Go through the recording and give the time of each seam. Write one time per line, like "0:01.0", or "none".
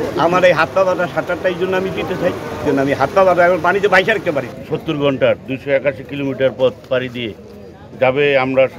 0:02.6
0:04.6